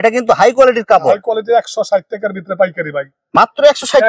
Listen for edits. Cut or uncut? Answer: uncut